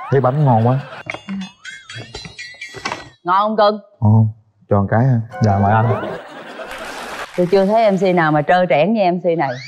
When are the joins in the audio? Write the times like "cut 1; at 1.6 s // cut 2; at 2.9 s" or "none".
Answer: cut 1; at 0.9 s // cut 2; at 7.2 s